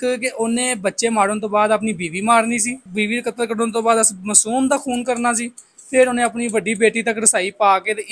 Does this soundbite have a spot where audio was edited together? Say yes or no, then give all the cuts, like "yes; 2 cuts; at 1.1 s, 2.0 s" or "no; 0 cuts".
yes; 1 cut; at 2.9 s